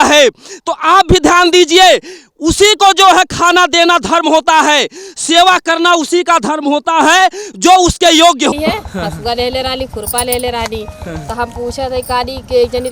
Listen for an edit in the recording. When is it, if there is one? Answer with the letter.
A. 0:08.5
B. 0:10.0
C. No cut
A